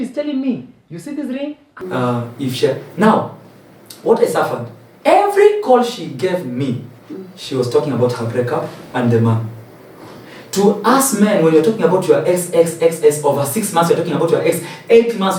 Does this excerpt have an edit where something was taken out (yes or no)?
yes